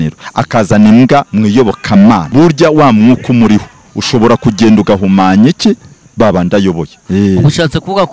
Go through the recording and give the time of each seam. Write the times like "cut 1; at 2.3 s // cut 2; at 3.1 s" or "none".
cut 1; at 2.3 s // cut 2; at 7.0 s